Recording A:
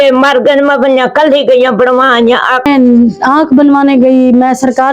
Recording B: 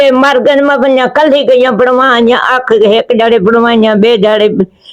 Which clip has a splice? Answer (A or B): A